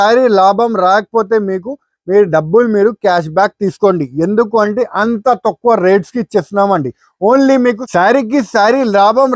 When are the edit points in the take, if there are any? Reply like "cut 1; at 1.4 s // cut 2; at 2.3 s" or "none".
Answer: cut 1; at 7.8 s